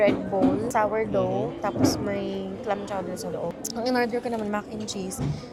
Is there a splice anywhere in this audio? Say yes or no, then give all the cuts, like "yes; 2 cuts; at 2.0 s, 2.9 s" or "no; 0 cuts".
no; 0 cuts